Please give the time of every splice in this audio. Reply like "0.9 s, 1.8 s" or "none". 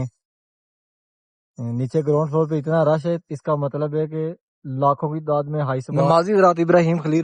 6.1 s